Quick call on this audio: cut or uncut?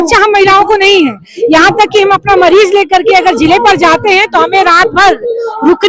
uncut